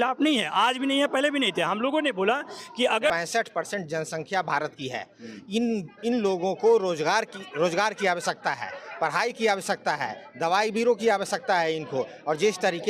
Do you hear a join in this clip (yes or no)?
yes